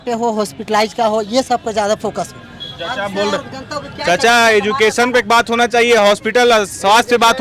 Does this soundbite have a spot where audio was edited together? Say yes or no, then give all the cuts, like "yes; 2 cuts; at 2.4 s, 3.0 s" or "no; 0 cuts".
no; 0 cuts